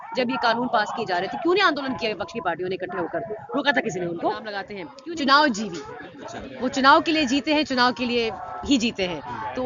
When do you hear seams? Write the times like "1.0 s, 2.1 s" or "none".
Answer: 4.8 s